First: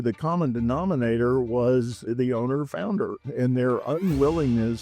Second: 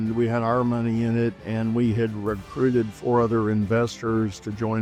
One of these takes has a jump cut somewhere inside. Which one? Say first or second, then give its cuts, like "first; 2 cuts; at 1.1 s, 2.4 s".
first; 1 cut; at 2.1 s